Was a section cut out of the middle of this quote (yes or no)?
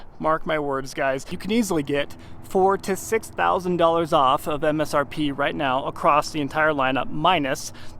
yes